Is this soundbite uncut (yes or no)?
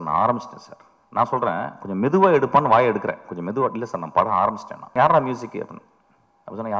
no